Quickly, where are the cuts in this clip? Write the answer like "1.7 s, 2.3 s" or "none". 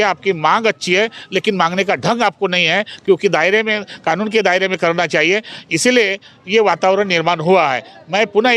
none